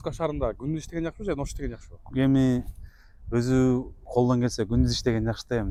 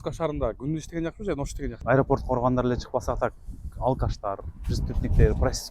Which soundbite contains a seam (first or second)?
second